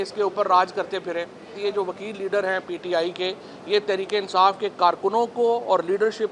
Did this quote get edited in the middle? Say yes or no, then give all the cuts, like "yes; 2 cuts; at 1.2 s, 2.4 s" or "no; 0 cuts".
yes; 1 cut; at 1.6 s